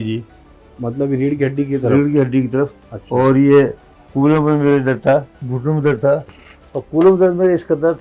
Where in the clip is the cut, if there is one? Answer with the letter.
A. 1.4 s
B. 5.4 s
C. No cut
B